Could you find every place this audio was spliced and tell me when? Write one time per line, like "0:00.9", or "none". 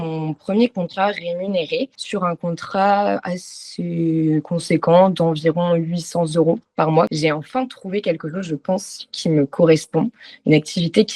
0:01.9
0:07.1